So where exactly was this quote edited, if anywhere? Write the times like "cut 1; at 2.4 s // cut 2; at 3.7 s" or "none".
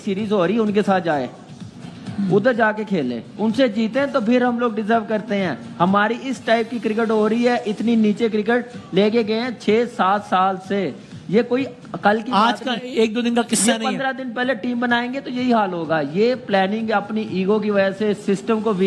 none